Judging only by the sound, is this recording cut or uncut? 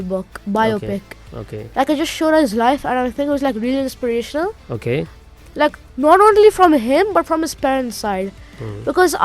uncut